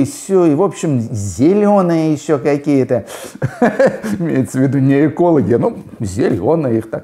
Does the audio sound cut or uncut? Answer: uncut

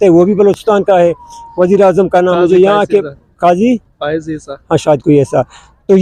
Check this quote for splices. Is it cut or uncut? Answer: uncut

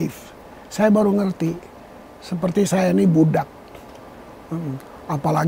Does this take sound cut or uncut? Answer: uncut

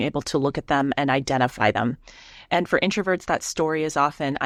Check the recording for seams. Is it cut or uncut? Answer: uncut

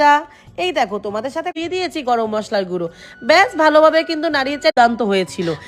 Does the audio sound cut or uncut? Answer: cut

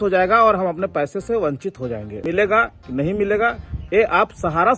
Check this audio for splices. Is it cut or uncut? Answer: cut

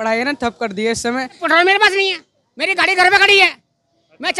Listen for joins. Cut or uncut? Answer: cut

